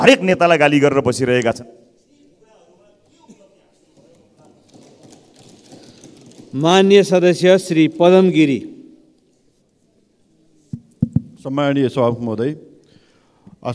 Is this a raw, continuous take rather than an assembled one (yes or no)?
yes